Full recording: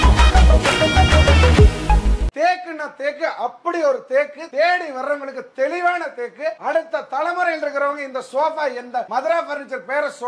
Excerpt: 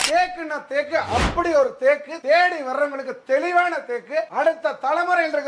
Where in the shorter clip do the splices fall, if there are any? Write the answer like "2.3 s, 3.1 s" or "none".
none